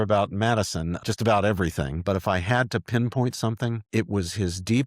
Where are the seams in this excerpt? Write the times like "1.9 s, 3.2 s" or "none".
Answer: 1.0 s, 2.0 s, 3.8 s